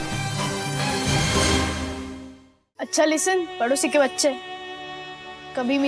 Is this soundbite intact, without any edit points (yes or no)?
no